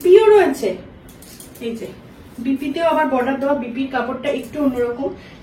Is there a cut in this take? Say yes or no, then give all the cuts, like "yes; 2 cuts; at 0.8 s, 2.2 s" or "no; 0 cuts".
no; 0 cuts